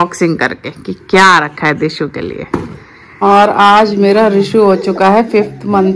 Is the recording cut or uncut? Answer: cut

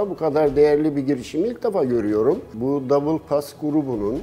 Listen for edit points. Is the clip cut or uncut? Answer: cut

